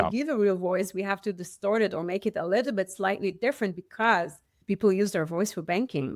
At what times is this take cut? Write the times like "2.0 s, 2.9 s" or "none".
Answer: 4.5 s